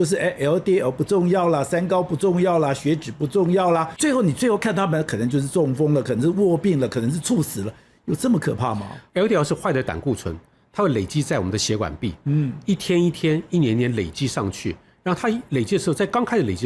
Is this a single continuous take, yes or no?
no